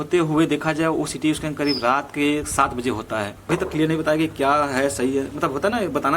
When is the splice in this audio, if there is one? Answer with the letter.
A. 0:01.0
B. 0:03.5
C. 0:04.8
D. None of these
B